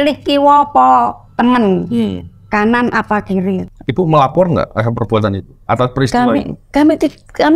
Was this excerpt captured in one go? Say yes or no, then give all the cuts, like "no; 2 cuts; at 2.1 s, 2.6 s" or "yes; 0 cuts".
no; 1 cut; at 3.7 s